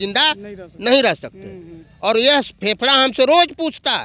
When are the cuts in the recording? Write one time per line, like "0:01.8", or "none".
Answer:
none